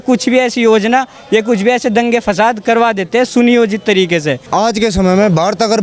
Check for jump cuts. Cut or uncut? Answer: cut